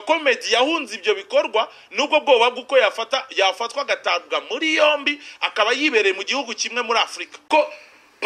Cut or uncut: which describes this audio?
cut